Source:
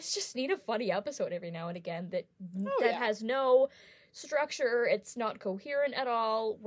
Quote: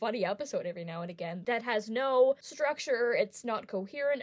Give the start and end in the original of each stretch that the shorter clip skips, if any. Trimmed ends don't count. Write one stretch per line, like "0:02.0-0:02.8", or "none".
0:02.3-0:02.9
0:03.8-0:04.2